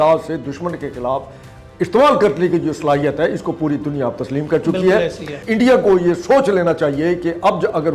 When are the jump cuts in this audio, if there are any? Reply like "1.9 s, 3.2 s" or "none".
5.4 s